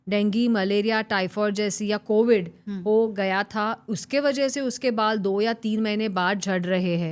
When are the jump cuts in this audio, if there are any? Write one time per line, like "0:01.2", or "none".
none